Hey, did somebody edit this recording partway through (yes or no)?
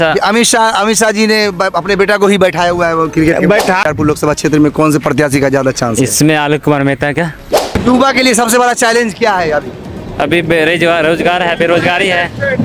yes